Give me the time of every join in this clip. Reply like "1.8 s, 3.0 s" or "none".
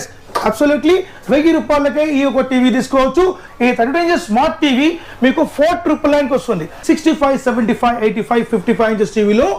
3.4 s, 6.8 s